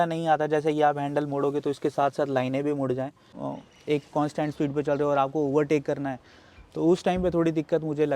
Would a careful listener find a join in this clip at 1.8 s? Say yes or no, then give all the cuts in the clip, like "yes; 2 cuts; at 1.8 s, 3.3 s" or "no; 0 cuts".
no; 1 cut; at 3.3 s